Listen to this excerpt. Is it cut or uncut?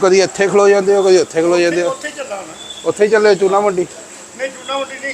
uncut